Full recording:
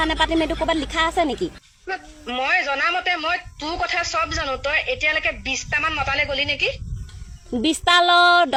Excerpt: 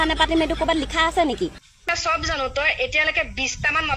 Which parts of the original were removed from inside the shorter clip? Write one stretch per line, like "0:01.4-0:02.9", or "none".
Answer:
0:01.8-0:03.9